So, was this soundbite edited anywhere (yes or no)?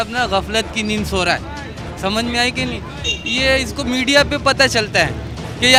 no